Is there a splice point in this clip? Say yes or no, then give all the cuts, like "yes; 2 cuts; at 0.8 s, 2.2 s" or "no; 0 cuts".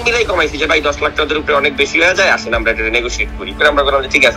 yes; 1 cut; at 3.5 s